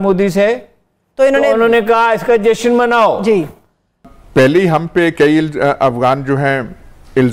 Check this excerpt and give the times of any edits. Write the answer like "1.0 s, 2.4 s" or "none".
4.1 s